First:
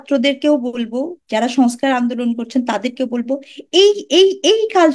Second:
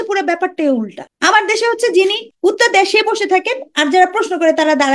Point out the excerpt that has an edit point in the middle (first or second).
second